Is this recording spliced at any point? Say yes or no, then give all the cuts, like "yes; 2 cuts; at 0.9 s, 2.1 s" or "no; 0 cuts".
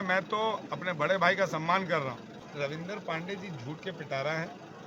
yes; 1 cut; at 2.4 s